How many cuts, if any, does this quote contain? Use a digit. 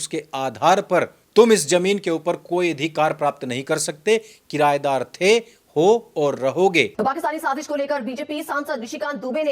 1